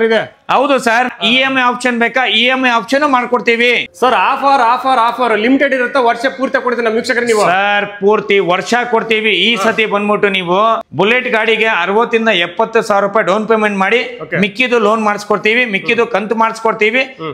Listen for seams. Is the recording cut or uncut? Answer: cut